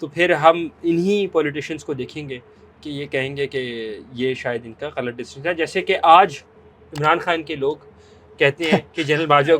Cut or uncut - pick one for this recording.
uncut